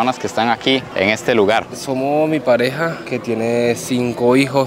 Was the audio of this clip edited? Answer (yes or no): yes